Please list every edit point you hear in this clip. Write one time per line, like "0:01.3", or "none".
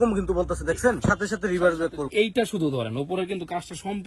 0:02.1